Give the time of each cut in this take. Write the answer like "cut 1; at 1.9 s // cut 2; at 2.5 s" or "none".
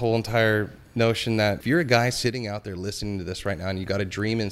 cut 1; at 1.6 s